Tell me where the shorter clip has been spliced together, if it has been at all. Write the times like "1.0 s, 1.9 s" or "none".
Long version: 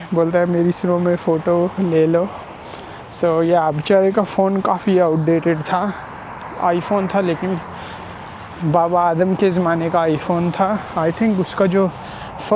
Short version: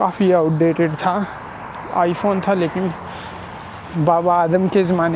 none

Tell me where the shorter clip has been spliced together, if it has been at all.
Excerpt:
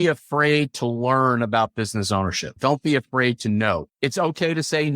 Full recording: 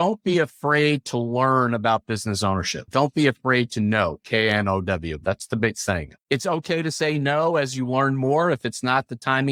3.9 s

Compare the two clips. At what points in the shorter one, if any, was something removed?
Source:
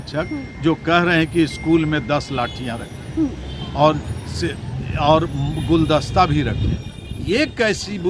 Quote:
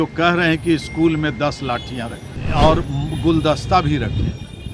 2.3 s

